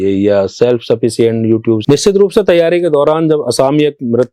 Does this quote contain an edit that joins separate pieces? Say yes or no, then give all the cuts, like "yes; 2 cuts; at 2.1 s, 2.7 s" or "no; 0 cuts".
yes; 1 cut; at 1.8 s